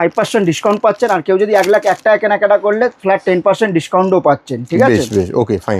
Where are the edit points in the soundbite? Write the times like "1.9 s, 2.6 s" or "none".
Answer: none